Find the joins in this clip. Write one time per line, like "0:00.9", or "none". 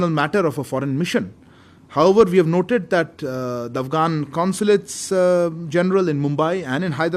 none